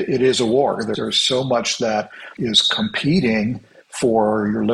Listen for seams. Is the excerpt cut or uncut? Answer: cut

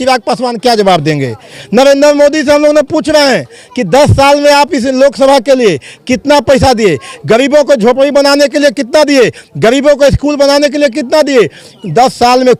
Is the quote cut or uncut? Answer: uncut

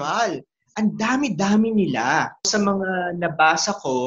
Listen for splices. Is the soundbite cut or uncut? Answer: cut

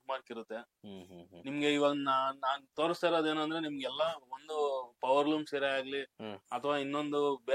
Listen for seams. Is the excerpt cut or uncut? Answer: uncut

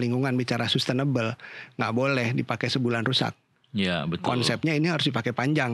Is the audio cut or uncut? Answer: uncut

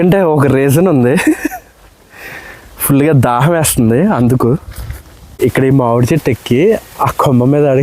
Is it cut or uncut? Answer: cut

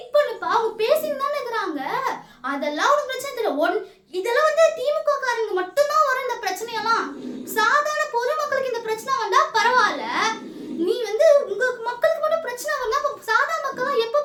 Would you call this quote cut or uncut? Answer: uncut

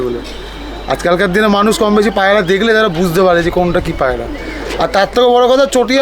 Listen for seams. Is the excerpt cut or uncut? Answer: uncut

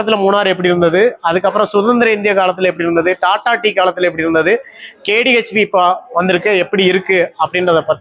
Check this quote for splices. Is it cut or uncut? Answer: uncut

